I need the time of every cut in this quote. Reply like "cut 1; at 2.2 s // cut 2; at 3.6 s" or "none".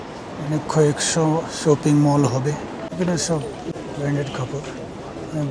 cut 1; at 2.9 s // cut 2; at 3.8 s

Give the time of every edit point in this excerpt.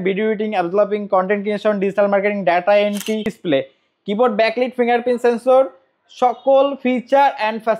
cut 1; at 3.3 s

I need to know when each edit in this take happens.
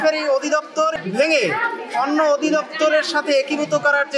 cut 1; at 0.9 s

